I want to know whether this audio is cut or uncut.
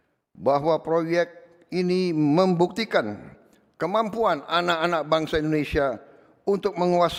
uncut